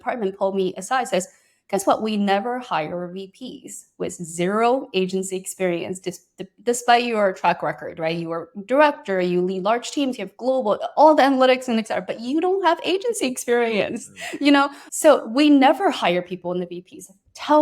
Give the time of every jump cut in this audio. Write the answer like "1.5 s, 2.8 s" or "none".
14.8 s